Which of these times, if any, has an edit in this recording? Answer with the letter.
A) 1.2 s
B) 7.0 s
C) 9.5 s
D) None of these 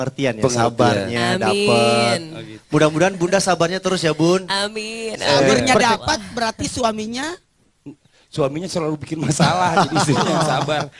A